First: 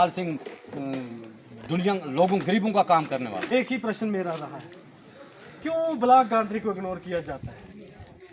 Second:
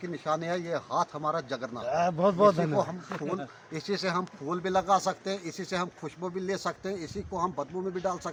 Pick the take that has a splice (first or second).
first